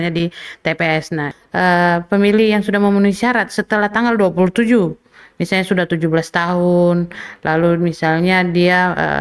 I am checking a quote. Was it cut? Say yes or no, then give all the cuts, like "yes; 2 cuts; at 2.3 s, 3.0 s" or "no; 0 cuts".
yes; 1 cut; at 1.4 s